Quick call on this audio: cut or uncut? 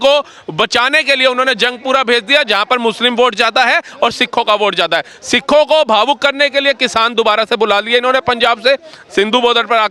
uncut